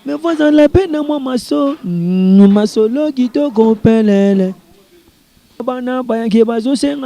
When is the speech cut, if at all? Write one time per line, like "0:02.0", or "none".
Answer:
0:05.6